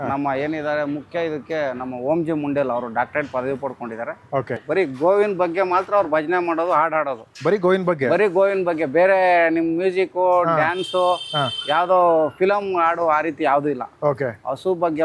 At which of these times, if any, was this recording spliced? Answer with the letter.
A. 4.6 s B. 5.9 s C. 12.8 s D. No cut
A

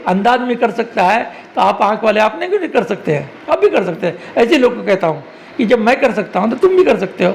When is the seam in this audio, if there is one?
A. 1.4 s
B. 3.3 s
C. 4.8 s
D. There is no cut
D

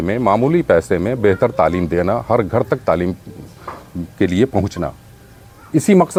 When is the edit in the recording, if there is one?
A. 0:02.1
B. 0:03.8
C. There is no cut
C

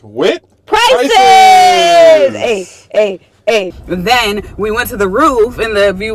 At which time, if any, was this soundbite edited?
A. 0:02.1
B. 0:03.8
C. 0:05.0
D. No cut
B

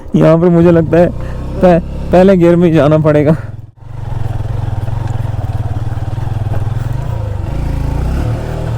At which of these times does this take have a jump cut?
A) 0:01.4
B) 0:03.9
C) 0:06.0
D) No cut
B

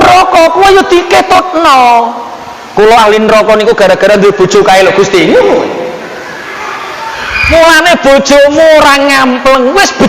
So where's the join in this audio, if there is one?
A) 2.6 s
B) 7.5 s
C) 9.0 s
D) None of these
B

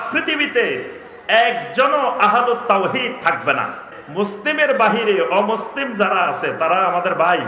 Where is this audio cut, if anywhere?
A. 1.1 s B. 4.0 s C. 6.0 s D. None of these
B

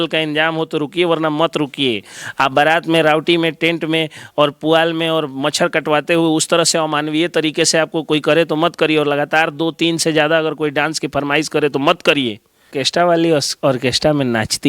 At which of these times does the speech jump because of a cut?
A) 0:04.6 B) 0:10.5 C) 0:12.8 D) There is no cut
C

